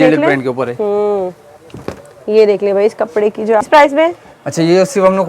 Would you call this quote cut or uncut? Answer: cut